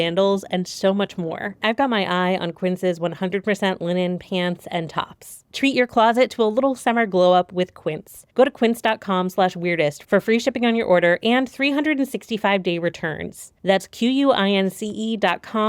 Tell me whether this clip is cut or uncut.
cut